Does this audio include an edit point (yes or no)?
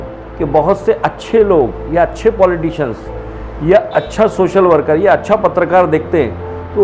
no